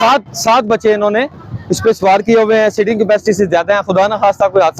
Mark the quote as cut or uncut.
uncut